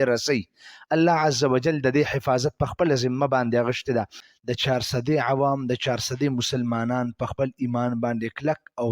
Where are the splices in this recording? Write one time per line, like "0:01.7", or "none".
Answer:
0:04.2